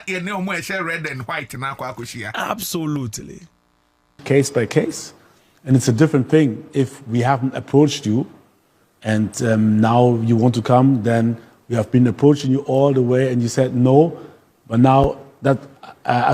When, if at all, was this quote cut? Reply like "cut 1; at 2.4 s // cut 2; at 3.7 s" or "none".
cut 1; at 4.2 s